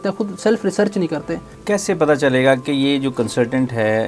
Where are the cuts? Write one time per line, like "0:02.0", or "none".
0:01.5